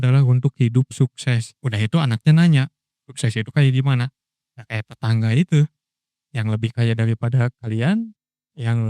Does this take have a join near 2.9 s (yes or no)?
no